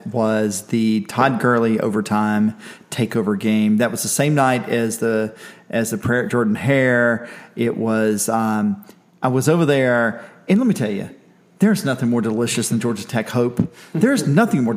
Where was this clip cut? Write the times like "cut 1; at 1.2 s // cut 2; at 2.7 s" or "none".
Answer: none

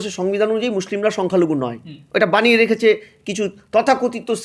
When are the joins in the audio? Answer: none

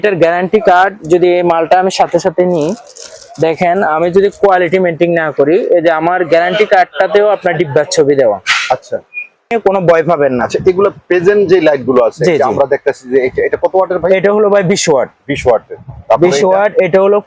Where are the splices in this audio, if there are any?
cut 1; at 9.5 s

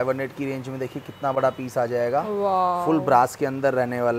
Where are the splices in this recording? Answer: none

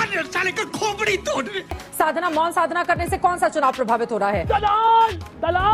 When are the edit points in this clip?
cut 1; at 1.7 s

